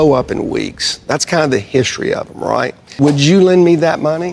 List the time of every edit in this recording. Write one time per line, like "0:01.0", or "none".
0:02.8